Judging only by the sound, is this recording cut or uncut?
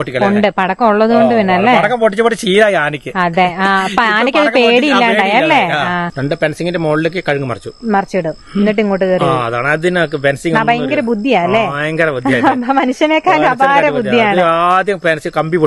uncut